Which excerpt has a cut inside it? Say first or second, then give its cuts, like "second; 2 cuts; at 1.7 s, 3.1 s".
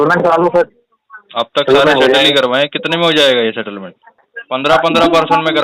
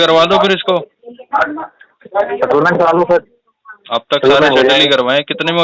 first; 1 cut; at 4.2 s